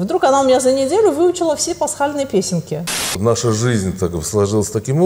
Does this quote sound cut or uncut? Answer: cut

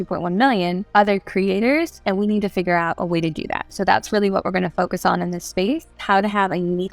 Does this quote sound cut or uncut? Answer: cut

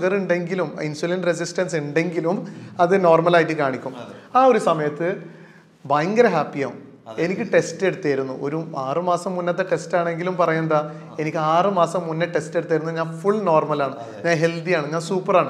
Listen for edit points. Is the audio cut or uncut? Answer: uncut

